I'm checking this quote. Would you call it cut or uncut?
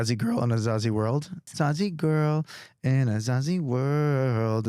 cut